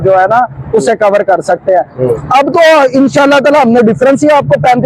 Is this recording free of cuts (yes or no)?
yes